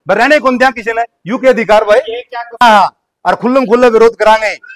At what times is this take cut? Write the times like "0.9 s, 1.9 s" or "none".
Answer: 2.6 s